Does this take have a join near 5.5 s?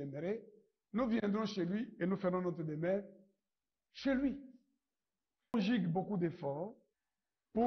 yes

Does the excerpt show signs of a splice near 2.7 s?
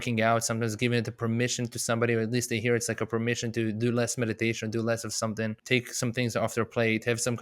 no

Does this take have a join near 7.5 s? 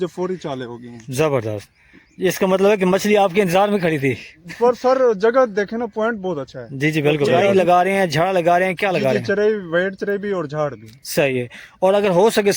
yes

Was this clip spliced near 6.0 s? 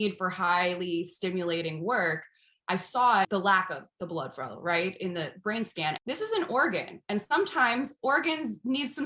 yes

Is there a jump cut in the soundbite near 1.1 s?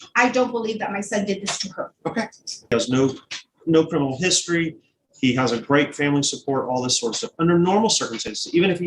no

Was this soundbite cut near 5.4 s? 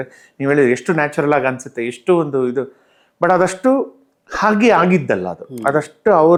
no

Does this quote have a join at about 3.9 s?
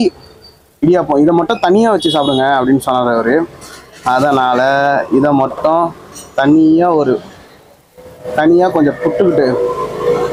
no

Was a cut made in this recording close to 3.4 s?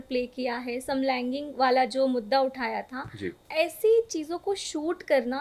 yes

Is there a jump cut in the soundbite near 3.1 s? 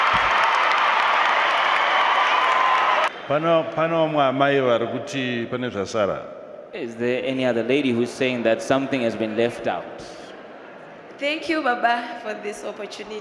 yes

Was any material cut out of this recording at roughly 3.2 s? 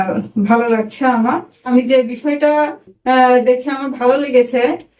no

